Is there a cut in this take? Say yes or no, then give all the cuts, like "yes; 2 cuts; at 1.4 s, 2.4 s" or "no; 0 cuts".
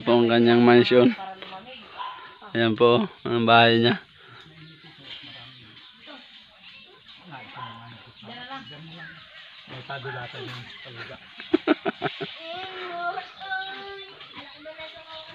no; 0 cuts